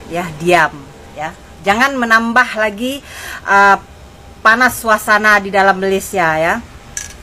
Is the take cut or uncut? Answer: uncut